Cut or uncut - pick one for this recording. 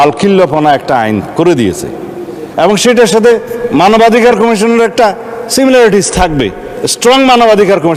uncut